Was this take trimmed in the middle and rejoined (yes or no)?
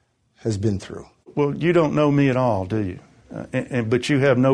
yes